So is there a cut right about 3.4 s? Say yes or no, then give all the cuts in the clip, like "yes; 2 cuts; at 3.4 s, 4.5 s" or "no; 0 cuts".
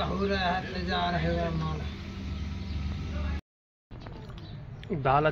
yes; 1 cut; at 3.4 s